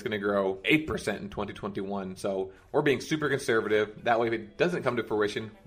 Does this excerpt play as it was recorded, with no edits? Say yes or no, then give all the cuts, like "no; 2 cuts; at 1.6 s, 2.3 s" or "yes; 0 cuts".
yes; 0 cuts